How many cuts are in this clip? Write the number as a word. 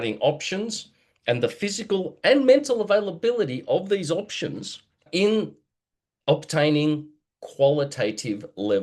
zero